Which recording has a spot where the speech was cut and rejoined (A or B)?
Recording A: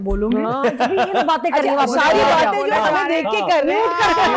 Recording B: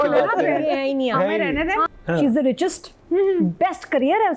B